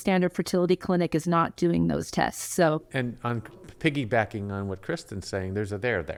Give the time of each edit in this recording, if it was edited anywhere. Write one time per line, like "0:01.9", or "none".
none